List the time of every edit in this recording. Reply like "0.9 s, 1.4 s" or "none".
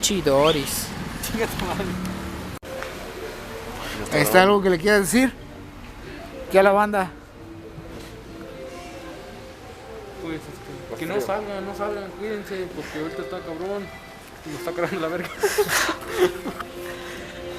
none